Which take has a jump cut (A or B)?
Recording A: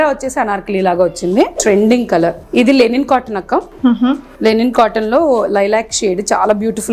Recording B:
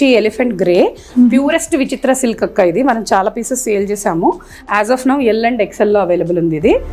A